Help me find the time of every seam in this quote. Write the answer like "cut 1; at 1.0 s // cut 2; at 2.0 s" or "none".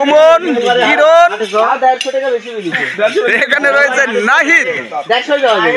none